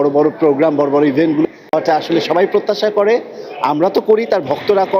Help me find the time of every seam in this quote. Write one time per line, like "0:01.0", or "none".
0:01.4